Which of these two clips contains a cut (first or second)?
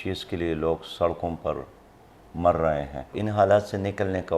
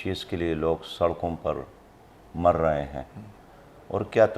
first